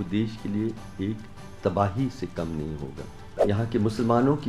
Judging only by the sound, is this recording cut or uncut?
cut